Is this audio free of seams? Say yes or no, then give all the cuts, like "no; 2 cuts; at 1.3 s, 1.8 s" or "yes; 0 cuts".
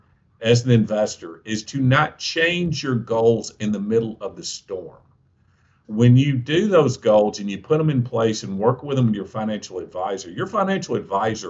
no; 1 cut; at 5.8 s